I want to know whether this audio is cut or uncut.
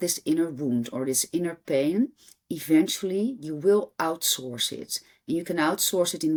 uncut